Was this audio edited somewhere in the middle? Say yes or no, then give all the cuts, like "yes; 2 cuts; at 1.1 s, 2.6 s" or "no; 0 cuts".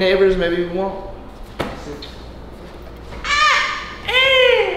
no; 0 cuts